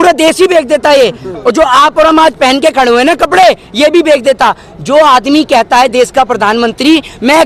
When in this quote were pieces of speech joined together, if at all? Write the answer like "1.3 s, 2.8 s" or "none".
none